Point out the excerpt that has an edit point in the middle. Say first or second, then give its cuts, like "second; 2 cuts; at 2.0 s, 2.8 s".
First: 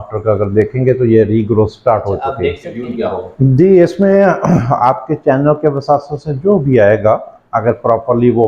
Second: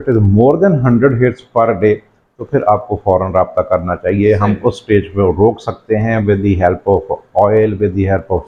first; 1 cut; at 2.8 s